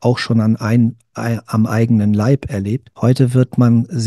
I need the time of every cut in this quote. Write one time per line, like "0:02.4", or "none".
0:02.9